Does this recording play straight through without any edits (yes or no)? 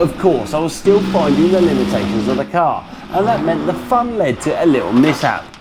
yes